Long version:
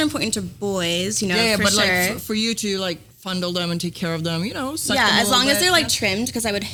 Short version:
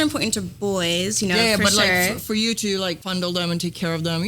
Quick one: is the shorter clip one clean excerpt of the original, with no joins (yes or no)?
no